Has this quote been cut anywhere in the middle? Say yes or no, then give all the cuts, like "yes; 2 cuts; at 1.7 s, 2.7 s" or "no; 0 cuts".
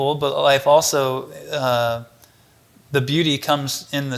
no; 0 cuts